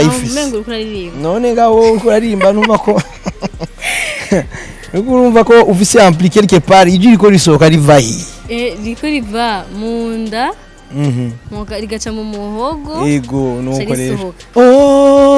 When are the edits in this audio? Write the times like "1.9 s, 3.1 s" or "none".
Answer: 14.3 s